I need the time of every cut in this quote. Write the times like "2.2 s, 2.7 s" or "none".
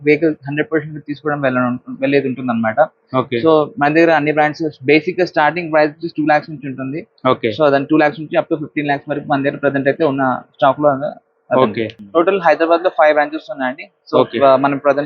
12.0 s